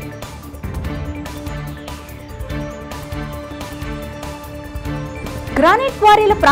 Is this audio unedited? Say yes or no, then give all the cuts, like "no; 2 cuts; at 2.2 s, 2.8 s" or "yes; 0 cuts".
no; 1 cut; at 3.4 s